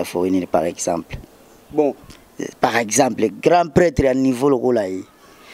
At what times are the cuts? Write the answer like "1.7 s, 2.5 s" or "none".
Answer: none